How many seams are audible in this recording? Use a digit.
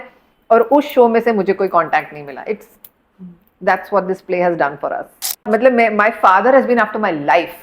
1